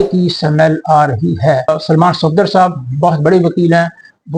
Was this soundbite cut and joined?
yes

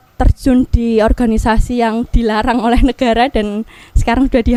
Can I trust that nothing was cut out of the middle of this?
yes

